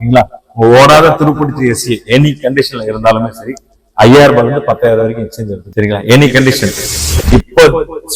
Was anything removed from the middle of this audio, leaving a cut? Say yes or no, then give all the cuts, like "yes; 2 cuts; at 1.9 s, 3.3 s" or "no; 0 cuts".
yes; 1 cut; at 6.8 s